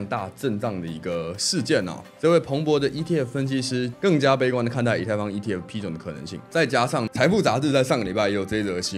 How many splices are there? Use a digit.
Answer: 4